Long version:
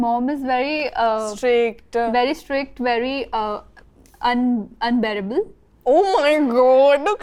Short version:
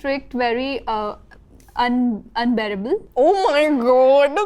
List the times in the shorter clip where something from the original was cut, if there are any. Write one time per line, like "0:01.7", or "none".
0:03.1

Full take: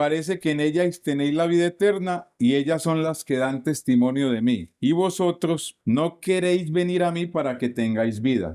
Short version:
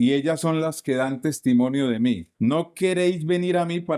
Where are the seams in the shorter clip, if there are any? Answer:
0:02.3

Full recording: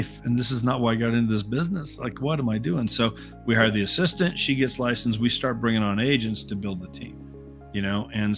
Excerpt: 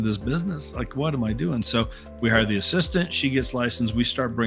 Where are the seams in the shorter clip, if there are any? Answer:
none

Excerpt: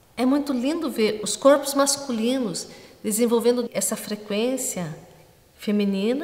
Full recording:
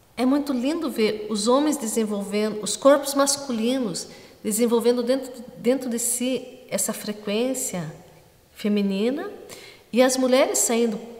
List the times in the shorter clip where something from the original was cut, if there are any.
0:01.3
0:03.7

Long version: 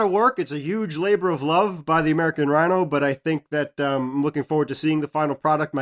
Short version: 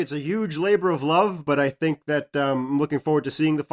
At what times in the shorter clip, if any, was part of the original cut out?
0:01.4

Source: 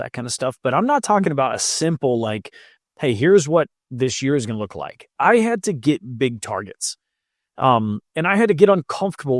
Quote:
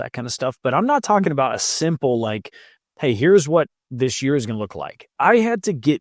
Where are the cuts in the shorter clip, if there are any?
none

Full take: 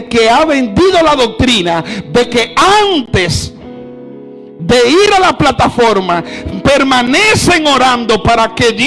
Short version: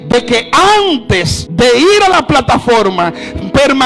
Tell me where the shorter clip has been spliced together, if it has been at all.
0:01.4

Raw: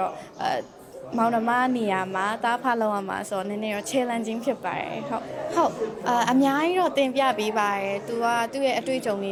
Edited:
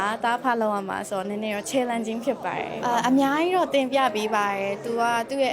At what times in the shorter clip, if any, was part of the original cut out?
0:02.7

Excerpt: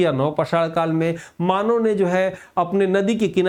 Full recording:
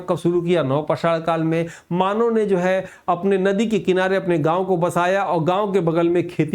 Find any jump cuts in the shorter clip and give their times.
none

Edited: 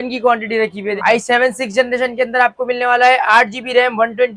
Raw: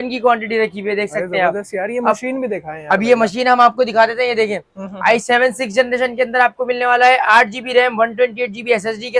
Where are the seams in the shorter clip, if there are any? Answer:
0:01.0

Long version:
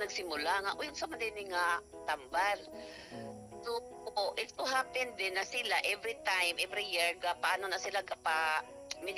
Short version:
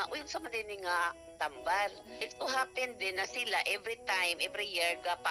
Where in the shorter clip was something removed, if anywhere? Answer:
0:02.3

